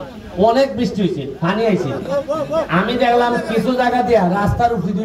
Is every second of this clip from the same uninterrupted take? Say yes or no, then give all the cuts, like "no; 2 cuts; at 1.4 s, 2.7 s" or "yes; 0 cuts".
yes; 0 cuts